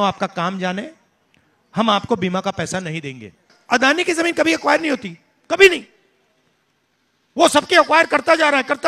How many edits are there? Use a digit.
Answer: 1